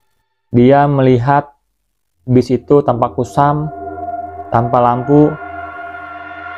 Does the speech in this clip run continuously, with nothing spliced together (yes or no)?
yes